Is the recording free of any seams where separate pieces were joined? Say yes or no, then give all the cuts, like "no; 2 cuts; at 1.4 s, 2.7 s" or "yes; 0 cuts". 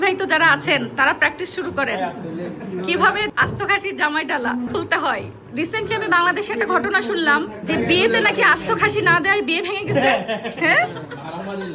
no; 3 cuts; at 3.3 s, 5.2 s, 7.6 s